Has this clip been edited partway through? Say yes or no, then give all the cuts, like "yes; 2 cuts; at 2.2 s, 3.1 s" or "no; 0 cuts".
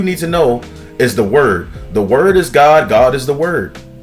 no; 0 cuts